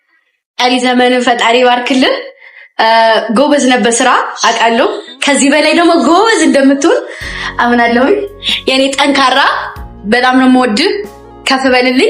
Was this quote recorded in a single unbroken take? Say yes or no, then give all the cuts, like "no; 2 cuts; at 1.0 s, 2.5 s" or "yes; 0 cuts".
yes; 0 cuts